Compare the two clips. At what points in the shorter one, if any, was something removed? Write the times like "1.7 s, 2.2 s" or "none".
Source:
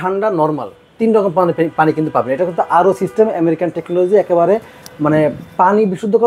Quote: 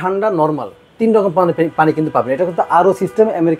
none